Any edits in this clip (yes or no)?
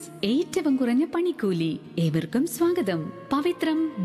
no